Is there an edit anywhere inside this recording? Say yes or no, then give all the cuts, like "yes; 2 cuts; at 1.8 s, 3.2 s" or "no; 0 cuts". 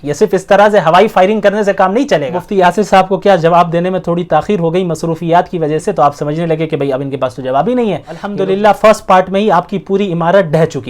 yes; 2 cuts; at 2.4 s, 8.3 s